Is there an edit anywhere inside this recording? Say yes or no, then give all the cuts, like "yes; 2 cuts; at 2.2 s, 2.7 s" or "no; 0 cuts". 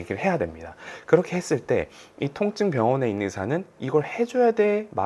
no; 0 cuts